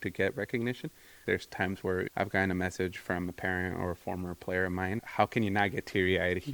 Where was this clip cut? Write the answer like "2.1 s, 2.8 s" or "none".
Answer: 1.2 s, 5.0 s